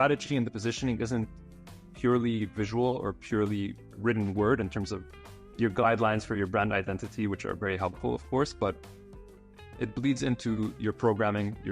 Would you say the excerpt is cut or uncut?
uncut